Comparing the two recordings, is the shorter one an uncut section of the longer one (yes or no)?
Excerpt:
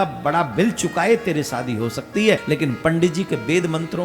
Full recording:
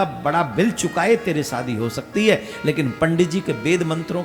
no